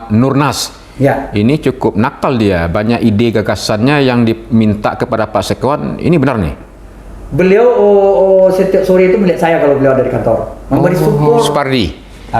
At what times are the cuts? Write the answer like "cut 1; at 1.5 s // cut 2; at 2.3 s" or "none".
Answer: cut 1; at 11.5 s